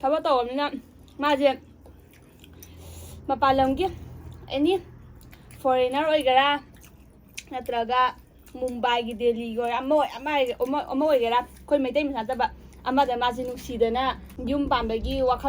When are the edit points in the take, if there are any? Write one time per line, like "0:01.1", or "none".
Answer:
0:14.3